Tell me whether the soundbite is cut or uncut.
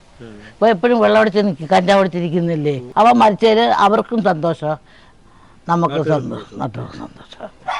uncut